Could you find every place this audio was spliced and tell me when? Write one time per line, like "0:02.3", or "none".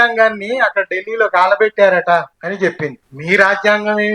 0:02.6